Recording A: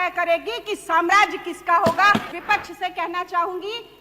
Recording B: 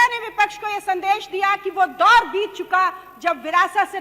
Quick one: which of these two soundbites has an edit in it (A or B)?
A